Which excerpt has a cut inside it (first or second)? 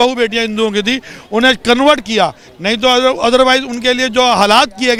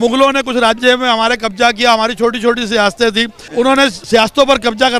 second